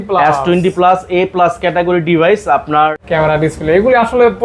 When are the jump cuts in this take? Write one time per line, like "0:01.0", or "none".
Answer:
0:03.0